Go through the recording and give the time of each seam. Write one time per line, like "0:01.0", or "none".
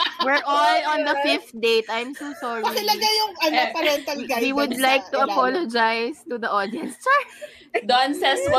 0:07.6